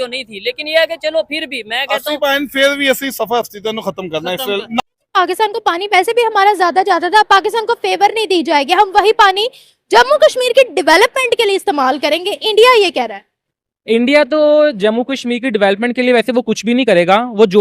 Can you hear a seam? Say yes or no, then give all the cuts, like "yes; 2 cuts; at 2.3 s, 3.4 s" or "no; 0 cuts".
yes; 1 cut; at 4.8 s